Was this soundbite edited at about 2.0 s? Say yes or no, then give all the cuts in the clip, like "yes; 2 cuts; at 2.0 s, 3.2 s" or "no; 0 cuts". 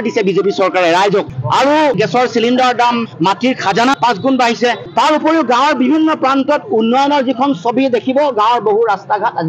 yes; 1 cut; at 2.0 s